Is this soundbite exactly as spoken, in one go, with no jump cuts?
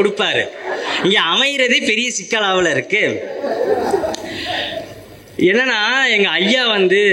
yes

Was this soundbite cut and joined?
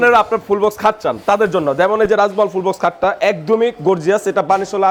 no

